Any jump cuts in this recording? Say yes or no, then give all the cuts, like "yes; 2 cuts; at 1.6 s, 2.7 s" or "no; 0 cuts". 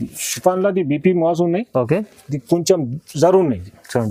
no; 0 cuts